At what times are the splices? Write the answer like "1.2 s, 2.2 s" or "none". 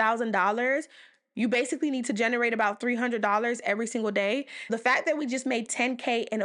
4.7 s